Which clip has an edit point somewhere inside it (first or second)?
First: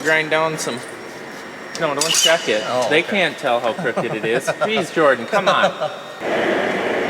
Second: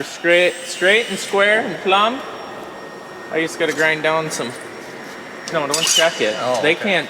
first